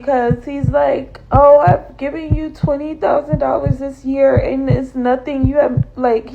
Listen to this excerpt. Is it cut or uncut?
uncut